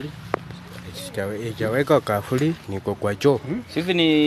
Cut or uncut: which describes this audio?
uncut